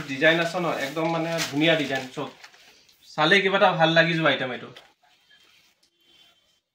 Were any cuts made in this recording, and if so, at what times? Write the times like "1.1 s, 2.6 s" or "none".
none